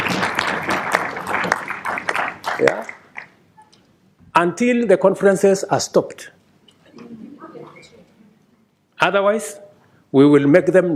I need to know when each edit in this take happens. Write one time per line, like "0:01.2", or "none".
none